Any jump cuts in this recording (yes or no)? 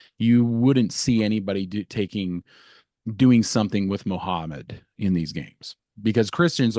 no